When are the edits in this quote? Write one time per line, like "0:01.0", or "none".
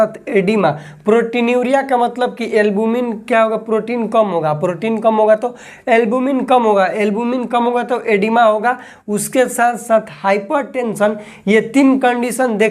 none